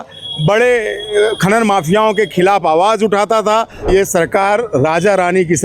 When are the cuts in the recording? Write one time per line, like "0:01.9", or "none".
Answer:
0:03.9